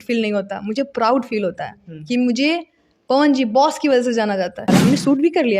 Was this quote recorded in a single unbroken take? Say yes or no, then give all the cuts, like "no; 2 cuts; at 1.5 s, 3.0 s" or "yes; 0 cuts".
no; 1 cut; at 4.7 s